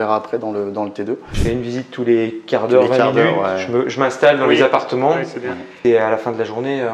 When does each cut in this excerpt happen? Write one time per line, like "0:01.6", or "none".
0:01.3
0:05.7